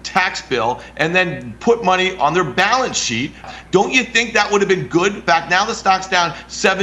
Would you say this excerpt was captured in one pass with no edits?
no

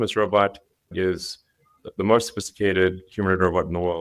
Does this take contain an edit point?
no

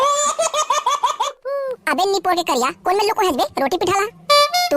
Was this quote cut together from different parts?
yes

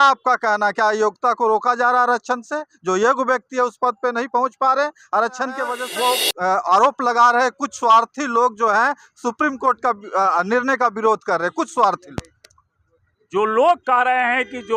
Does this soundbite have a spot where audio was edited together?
yes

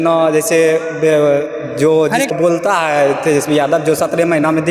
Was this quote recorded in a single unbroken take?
no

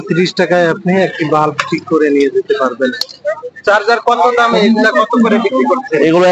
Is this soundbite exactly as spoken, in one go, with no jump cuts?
no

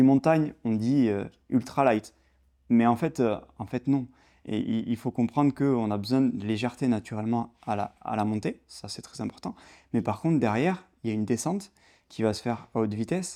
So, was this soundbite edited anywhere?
no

